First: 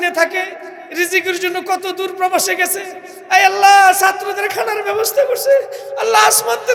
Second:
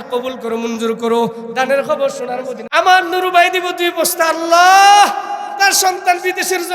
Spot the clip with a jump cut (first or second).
second